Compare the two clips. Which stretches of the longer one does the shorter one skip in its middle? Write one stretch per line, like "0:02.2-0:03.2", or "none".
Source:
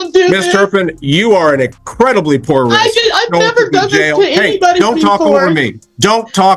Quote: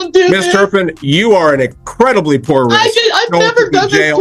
none